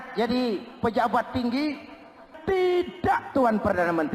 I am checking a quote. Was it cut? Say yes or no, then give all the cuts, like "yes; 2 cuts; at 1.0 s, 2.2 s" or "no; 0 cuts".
yes; 1 cut; at 2.3 s